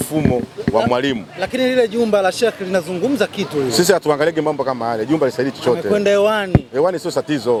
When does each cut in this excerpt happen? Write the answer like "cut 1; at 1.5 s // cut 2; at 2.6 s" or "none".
none